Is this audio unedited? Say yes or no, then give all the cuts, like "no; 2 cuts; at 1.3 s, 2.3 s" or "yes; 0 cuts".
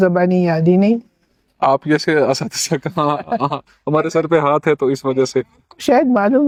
yes; 0 cuts